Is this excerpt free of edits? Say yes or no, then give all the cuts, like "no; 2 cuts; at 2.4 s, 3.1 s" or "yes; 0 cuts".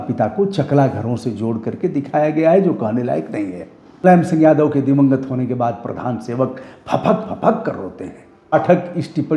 no; 2 cuts; at 4.0 s, 8.5 s